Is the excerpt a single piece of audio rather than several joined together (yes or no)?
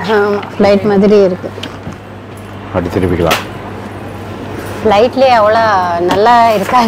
yes